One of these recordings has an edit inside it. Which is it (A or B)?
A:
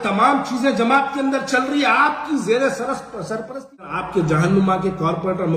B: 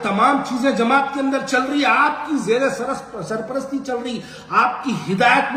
A